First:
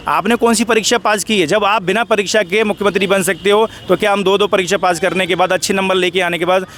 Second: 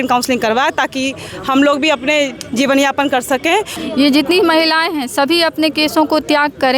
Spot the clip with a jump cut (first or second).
second